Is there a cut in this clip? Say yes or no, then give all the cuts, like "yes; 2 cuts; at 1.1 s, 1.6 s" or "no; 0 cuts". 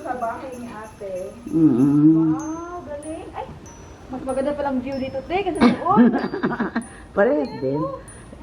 no; 0 cuts